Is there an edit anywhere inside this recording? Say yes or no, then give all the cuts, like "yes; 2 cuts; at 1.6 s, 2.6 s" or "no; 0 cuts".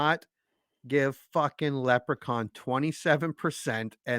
no; 0 cuts